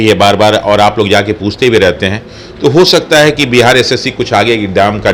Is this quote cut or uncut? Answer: uncut